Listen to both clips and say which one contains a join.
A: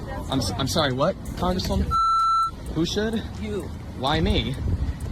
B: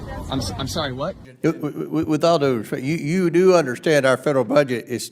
B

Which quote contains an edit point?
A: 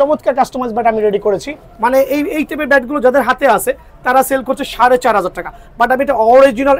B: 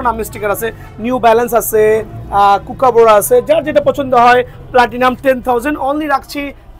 A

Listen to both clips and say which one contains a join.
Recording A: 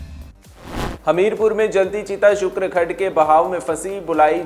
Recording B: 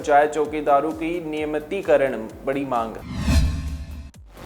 A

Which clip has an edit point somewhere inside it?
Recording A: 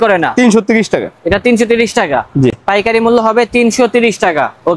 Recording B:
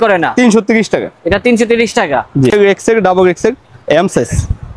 B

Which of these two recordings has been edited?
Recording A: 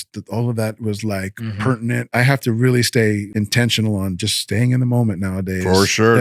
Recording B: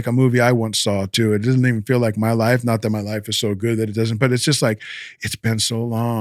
A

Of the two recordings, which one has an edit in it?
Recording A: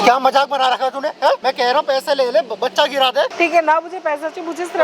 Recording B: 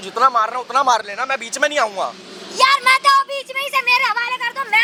A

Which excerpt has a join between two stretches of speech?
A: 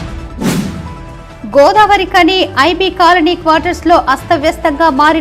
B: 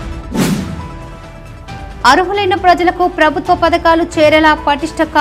A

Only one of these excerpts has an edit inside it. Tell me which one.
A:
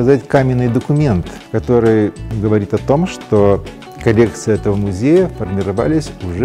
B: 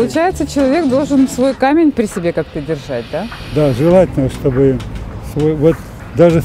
A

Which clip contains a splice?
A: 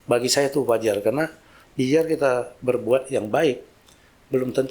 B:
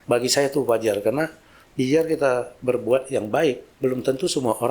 B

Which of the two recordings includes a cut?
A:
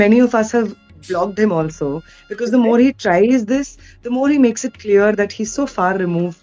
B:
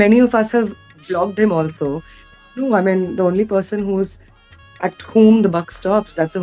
B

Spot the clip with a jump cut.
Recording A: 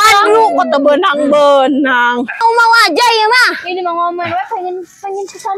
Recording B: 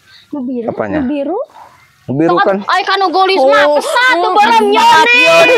A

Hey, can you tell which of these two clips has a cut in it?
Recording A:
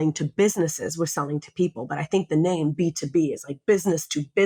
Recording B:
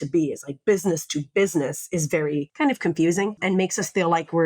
B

